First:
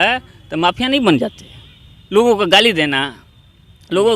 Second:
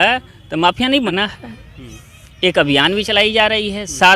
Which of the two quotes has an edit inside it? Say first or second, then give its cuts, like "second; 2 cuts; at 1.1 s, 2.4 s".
second; 1 cut; at 1.1 s